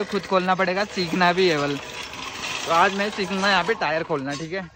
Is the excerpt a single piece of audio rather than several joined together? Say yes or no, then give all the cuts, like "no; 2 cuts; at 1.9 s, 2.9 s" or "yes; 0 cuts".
yes; 0 cuts